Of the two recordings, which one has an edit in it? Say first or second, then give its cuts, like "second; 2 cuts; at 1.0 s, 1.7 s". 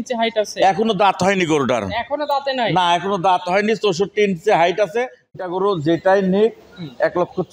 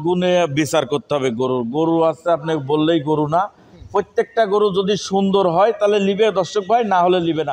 first; 1 cut; at 5.4 s